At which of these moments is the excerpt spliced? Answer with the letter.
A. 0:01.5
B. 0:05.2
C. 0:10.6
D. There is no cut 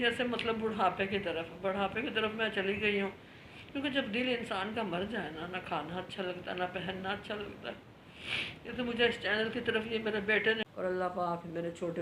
C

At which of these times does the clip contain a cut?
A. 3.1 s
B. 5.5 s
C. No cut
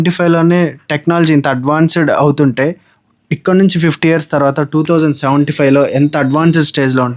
C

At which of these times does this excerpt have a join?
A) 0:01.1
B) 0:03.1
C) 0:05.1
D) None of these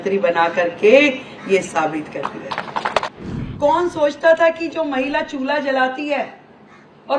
B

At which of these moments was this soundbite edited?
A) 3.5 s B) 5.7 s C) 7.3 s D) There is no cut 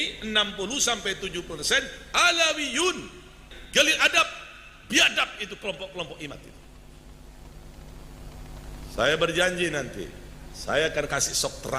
A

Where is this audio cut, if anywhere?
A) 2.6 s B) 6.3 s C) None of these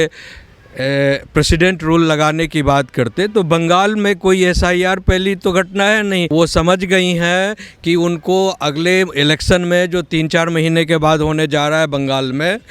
B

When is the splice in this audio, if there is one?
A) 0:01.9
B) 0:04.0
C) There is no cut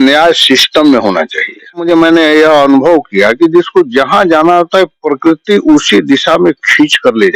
A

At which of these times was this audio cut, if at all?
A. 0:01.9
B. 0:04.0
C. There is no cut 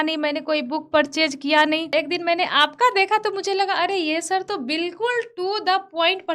A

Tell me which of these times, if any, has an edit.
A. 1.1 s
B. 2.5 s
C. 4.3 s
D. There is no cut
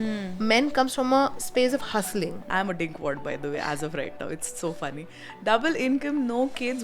B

